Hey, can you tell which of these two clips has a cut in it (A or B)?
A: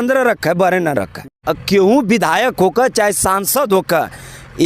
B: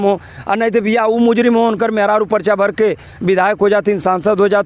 A